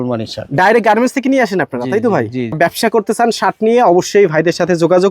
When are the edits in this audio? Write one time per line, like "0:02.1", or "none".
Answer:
0:02.6